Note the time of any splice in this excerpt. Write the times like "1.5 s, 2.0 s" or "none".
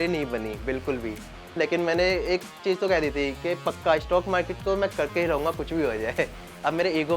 1.5 s